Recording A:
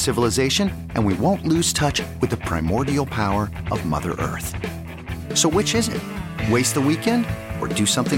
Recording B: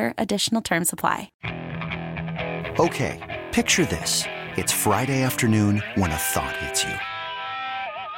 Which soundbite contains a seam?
B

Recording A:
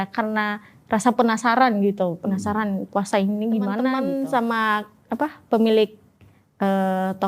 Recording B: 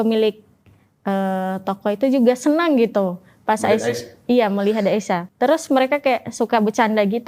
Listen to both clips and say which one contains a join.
A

